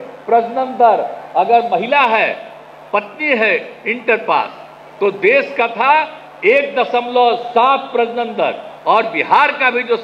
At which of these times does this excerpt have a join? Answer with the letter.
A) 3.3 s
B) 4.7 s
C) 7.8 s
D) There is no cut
D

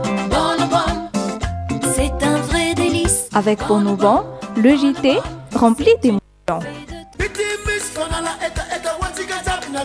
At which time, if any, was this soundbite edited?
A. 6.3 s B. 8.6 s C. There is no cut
C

